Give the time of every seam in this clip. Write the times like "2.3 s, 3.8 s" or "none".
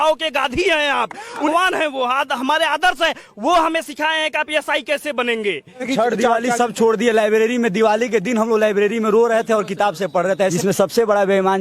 1.5 s, 5.9 s, 10.5 s